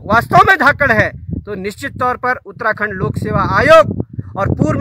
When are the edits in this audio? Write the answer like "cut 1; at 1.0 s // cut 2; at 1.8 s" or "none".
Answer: none

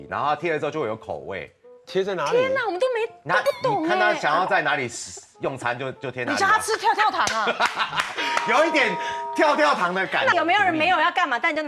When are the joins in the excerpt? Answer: cut 1; at 10.3 s

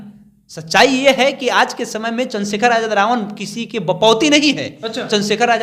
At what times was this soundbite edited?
none

